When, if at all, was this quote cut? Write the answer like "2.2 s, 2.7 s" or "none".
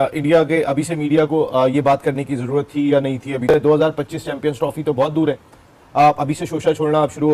none